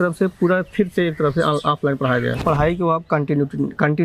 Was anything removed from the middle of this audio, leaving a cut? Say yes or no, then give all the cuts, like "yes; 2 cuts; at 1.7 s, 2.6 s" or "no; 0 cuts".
yes; 1 cut; at 2.4 s